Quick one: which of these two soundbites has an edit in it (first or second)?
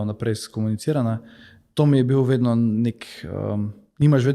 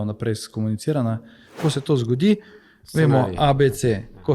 second